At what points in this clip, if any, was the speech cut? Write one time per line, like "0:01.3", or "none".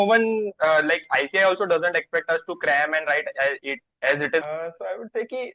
0:04.4